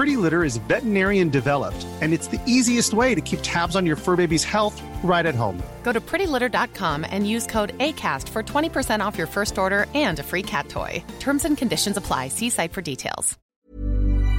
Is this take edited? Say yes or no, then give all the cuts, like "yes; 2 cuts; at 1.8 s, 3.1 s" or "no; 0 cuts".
yes; 1 cut; at 13.4 s